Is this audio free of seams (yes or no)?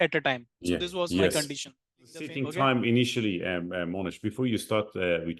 no